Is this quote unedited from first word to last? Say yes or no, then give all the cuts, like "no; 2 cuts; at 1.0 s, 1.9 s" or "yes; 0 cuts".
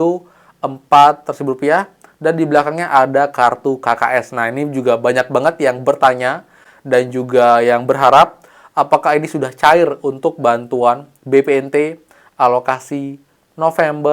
yes; 0 cuts